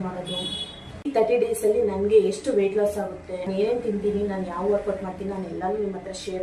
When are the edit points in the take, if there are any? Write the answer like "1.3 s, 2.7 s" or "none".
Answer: 1.1 s, 3.5 s